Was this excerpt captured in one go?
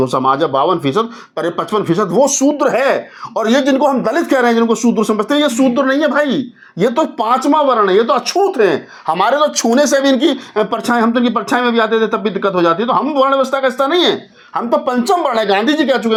yes; 0 cuts

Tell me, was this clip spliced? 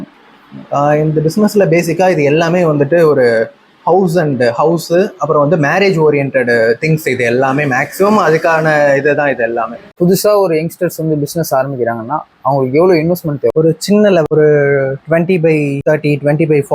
yes; 2 cuts; at 9.8 s, 15.8 s

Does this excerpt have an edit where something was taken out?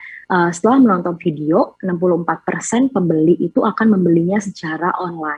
no; 0 cuts

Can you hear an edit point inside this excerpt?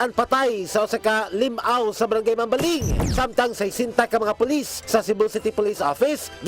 no; 0 cuts

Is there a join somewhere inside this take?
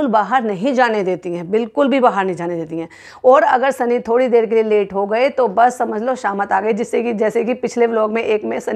no; 0 cuts

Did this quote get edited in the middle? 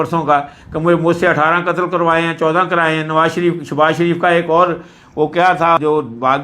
no; 0 cuts

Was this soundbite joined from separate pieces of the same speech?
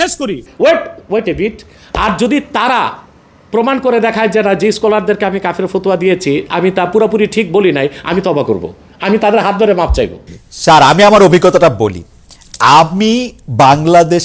no; 0 cuts

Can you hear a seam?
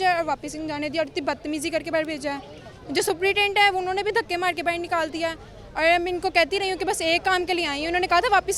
no; 0 cuts

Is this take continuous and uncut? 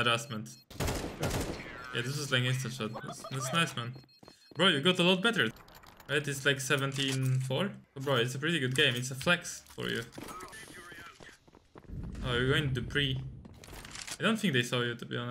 no; 3 cuts; at 5.6 s, 7.9 s, 10.5 s

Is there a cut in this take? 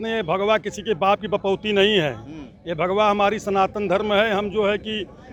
no; 0 cuts

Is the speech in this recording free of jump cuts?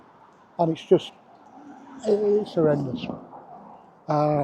yes; 0 cuts

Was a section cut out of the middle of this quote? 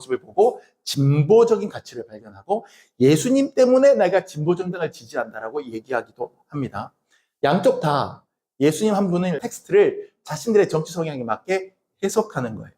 yes; 1 cut; at 9.5 s

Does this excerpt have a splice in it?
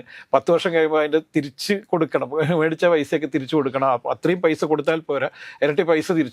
no; 0 cuts

